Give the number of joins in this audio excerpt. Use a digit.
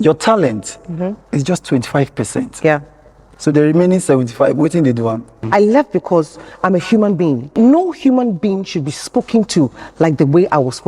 2